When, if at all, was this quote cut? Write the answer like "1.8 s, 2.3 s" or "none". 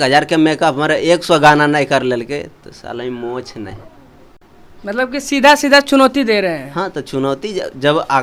none